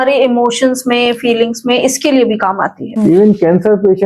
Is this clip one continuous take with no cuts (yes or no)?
no